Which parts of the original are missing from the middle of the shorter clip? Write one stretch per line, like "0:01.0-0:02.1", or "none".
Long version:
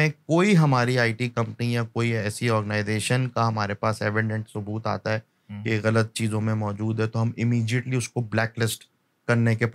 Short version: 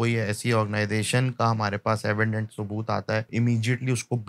0:05.3-0:07.3